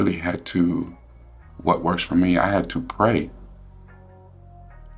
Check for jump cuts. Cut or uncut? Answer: uncut